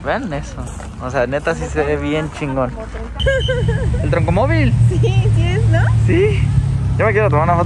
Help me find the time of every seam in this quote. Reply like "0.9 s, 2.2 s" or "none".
3.2 s